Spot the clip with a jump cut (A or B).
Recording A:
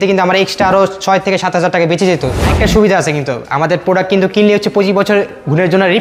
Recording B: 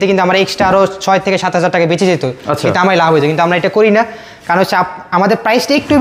A